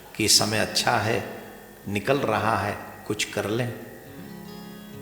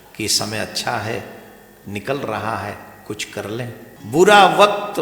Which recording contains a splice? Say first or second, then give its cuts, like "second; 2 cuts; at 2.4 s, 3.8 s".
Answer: second; 1 cut; at 3.9 s